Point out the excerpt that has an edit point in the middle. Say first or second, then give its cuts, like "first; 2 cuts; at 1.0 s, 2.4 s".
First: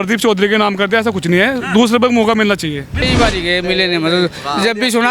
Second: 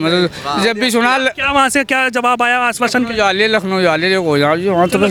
first; 1 cut; at 3.0 s